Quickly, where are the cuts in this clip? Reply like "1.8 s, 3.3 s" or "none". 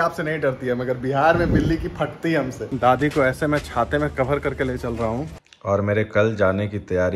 2.7 s, 5.3 s